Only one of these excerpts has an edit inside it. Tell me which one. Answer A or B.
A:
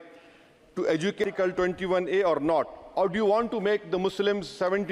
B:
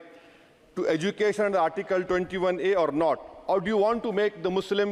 A